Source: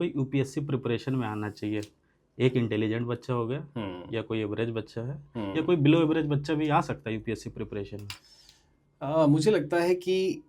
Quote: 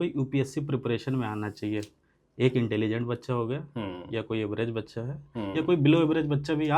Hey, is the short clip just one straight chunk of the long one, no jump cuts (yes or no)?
yes